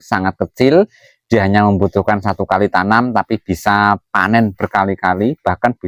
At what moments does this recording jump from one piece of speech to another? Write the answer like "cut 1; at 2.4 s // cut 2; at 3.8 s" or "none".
none